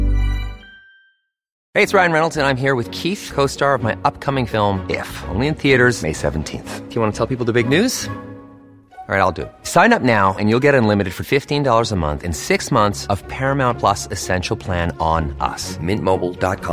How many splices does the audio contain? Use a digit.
1